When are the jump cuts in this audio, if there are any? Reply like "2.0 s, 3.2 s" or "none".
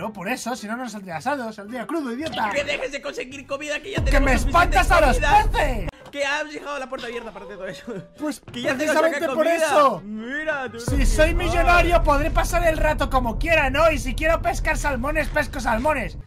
5.9 s